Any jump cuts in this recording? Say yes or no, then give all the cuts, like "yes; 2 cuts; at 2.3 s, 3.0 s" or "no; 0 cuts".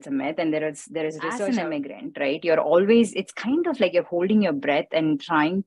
yes; 1 cut; at 1.3 s